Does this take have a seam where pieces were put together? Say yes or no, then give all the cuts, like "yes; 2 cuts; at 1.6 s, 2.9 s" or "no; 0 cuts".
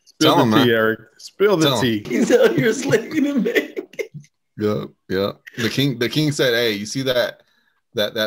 yes; 1 cut; at 2.1 s